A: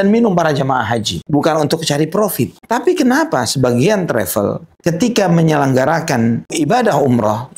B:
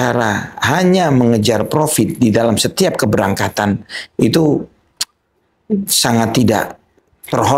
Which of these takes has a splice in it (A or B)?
A